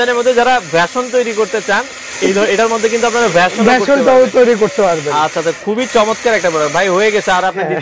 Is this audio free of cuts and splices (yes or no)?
yes